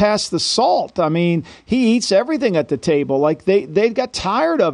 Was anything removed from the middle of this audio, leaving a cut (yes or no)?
no